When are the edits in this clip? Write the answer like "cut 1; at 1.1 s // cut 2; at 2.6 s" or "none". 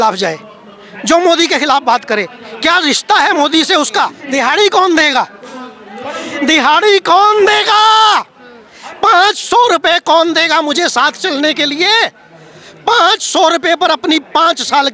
cut 1; at 4.2 s